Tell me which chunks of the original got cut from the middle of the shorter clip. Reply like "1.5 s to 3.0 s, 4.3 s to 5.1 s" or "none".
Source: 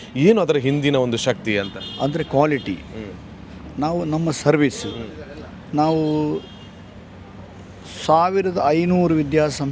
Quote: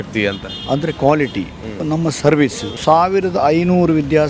3.1 s to 4.0 s, 4.9 s to 7.9 s